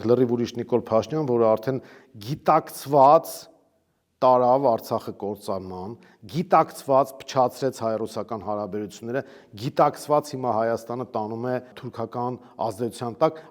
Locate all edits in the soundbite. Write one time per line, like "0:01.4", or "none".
0:11.8